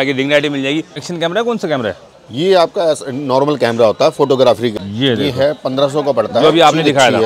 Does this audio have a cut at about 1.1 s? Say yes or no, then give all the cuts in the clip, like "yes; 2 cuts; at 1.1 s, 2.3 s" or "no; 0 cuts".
yes; 2 cuts; at 1.1 s, 4.7 s